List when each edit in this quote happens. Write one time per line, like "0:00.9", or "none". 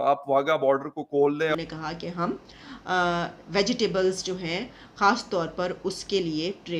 0:01.5